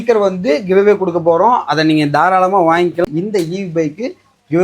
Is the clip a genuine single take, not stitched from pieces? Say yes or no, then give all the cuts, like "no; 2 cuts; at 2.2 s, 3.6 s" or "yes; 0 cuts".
no; 1 cut; at 3.0 s